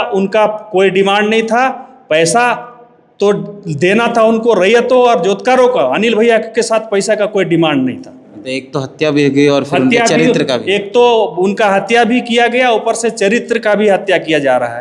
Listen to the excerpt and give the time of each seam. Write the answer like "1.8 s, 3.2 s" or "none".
none